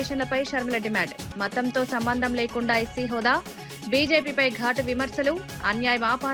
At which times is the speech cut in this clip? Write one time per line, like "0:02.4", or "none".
none